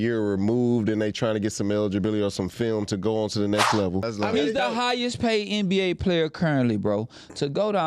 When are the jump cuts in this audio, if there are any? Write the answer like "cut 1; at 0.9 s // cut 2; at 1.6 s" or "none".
cut 1; at 4.1 s